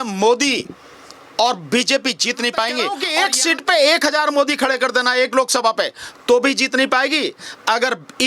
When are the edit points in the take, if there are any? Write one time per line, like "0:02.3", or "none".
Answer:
0:03.0